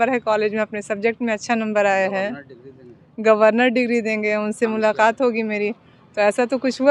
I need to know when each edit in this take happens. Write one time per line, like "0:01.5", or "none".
none